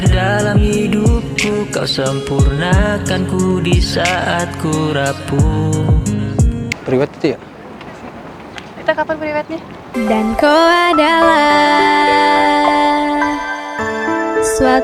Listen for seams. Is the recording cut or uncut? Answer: cut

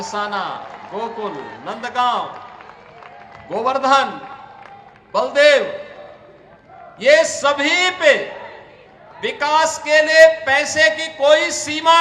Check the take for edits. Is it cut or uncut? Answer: uncut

